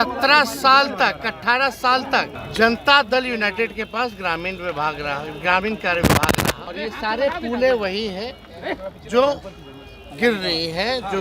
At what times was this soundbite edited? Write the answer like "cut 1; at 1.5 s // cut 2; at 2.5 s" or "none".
cut 1; at 2.4 s // cut 2; at 6.7 s

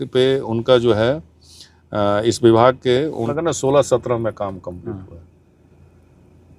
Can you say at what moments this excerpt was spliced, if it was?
cut 1; at 3.3 s

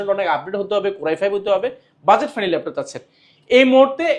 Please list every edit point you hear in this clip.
none

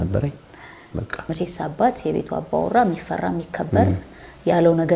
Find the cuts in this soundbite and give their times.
cut 1; at 1.3 s

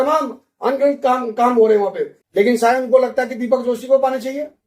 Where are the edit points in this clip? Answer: cut 1; at 2.1 s

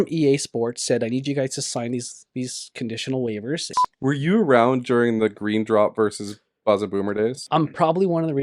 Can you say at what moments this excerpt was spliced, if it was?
cut 1; at 3.7 s // cut 2; at 7.4 s

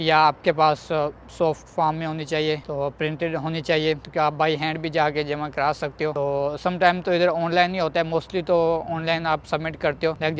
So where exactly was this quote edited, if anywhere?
none

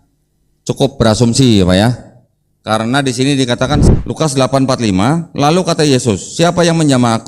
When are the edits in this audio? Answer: cut 1; at 3.9 s

